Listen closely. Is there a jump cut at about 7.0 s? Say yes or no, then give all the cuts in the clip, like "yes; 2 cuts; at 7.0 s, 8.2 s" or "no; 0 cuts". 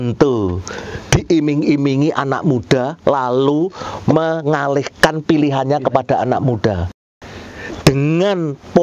yes; 1 cut; at 7.0 s